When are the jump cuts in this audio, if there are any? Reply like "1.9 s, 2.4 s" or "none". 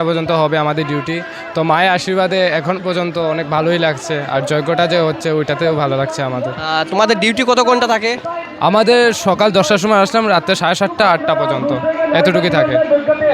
none